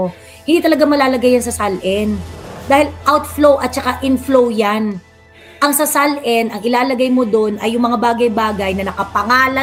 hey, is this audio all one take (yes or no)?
yes